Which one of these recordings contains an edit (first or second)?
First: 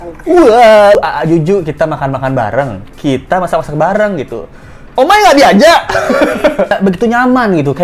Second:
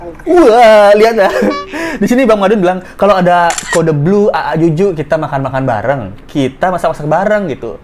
first